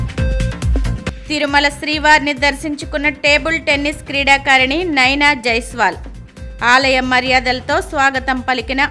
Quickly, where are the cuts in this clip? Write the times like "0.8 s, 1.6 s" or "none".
none

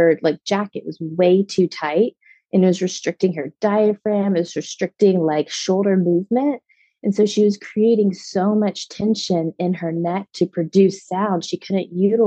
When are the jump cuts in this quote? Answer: none

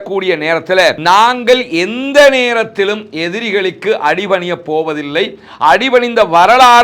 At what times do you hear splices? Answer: 1.0 s

